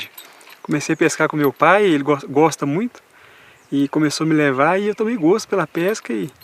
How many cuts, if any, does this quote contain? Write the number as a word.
zero